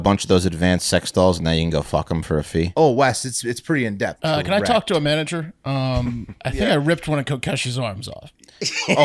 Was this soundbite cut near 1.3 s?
no; 3 cuts; at 2.7 s, 4.2 s, 6.3 s

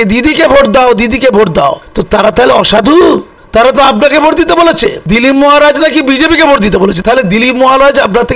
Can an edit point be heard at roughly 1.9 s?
yes; 4 cuts; at 1.9 s, 3.4 s, 5.0 s, 7.0 s

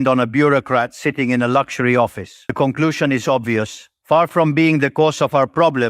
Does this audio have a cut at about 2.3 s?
yes; 1 cut; at 2.3 s

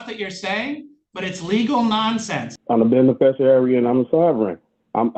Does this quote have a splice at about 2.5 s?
yes; 1 cut; at 2.5 s

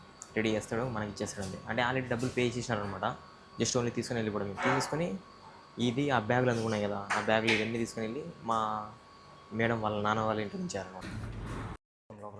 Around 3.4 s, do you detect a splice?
no; 1 cut; at 11.0 s

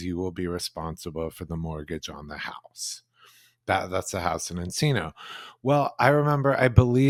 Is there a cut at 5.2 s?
no; 0 cuts

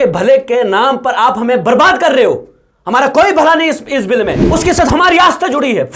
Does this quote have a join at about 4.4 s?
yes; 1 cut; at 4.4 s

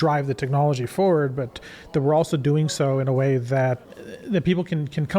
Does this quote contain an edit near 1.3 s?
no; 1 cut; at 3.8 s

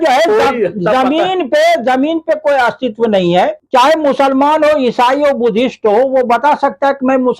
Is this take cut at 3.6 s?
yes; 1 cut; at 3.6 s

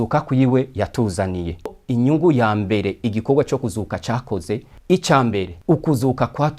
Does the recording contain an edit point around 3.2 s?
no; 3 cuts; at 1.7 s, 4.7 s, 5.5 s

